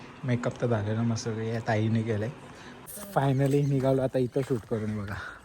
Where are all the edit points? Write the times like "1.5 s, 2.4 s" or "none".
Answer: 2.9 s